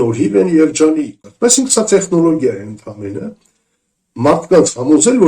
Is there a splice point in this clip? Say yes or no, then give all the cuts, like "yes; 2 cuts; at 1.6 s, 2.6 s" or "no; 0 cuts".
yes; 1 cut; at 1.1 s